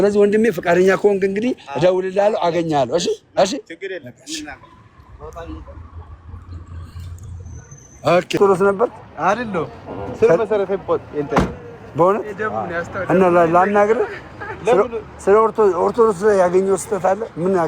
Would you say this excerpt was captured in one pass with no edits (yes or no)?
no